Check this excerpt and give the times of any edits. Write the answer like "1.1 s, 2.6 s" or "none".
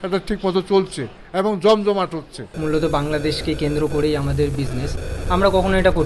none